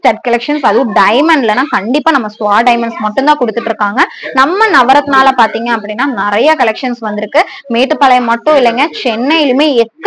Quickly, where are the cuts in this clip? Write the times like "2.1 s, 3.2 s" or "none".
none